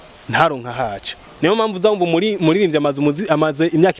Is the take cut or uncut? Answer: cut